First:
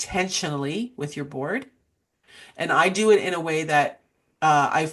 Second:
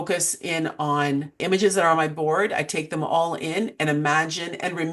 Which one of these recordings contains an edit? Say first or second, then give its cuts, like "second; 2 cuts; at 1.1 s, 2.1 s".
second; 1 cut; at 1.4 s